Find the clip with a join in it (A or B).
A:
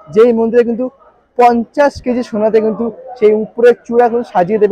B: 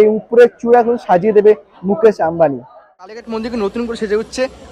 B